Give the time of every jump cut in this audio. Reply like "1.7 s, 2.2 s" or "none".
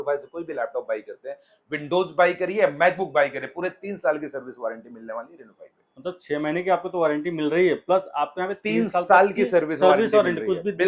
none